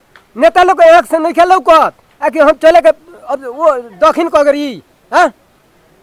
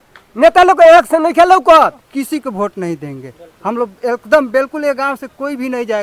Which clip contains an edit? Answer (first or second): second